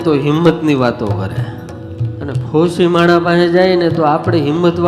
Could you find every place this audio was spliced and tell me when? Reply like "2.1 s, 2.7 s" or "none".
2.1 s